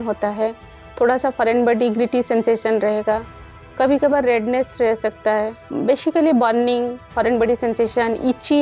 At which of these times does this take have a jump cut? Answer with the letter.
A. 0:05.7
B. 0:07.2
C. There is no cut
A